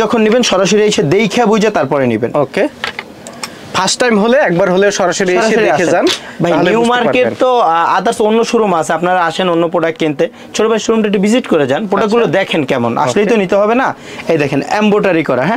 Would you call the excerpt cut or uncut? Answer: uncut